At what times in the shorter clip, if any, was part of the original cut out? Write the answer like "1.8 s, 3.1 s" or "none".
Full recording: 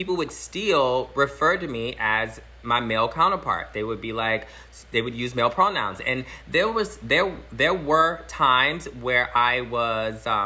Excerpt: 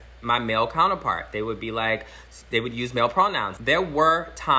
3.5 s